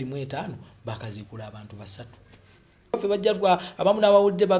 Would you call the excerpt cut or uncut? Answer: cut